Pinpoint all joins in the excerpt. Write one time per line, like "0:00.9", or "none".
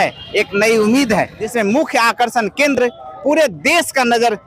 0:01.4